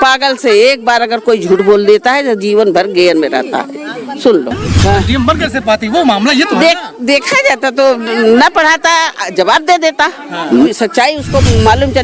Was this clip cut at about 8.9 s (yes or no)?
no